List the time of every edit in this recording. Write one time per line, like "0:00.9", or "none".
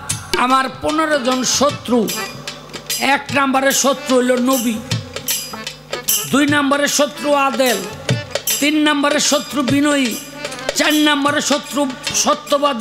none